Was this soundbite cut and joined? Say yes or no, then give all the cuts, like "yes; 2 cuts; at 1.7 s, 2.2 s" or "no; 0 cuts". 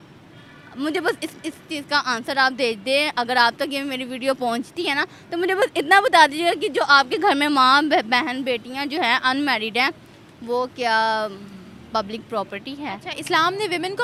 no; 0 cuts